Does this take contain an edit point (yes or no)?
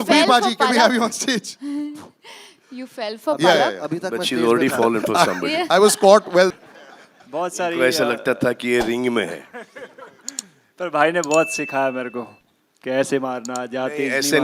yes